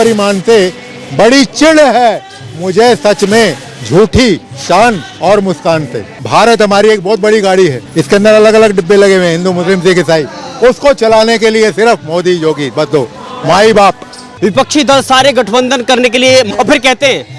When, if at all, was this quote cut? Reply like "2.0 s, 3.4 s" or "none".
6.1 s, 7.9 s, 14.3 s, 16.5 s